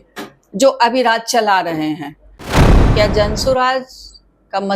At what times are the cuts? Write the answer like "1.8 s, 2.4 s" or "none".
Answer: 2.6 s

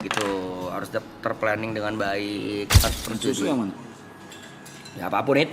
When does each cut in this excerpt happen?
2.9 s

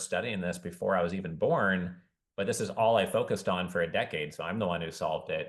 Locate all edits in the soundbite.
none

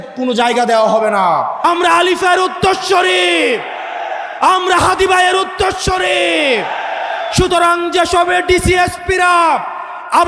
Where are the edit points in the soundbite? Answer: 1.6 s

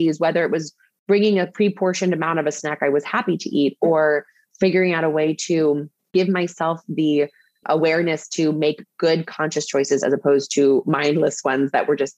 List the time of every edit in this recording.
6.1 s

